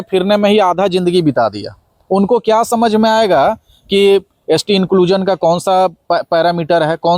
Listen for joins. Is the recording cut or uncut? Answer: uncut